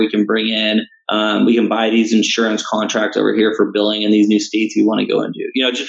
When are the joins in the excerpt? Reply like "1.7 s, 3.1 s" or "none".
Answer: 1.0 s